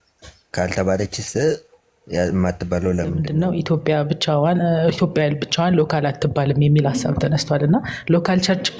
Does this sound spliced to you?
yes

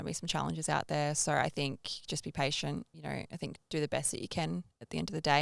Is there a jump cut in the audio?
yes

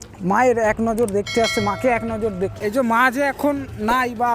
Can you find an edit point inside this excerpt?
yes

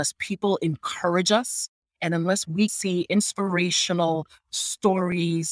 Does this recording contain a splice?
yes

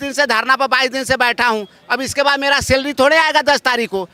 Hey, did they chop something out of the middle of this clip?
no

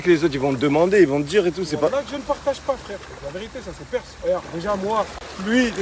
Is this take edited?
yes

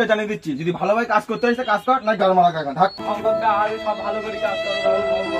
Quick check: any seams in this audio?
yes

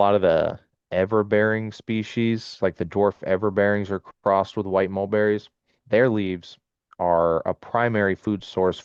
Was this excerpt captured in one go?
yes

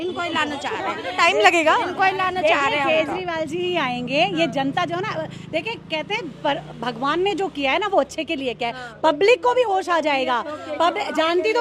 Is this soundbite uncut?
yes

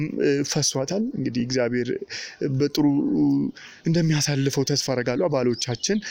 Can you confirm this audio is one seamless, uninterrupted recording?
yes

